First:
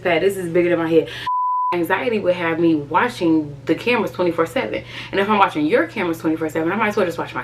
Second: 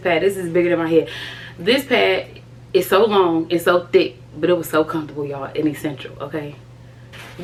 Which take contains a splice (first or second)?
first